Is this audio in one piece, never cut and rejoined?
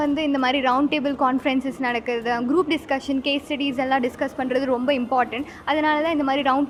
yes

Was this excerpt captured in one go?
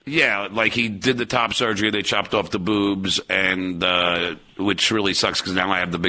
yes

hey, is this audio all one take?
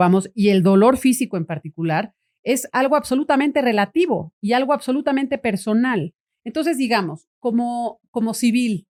yes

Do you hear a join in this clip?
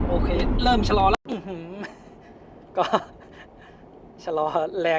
no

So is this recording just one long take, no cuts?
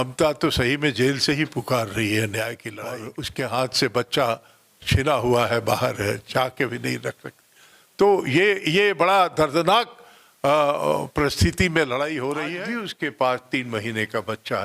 no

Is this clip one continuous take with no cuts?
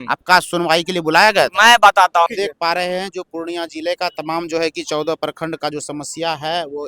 no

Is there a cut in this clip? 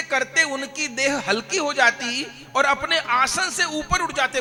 no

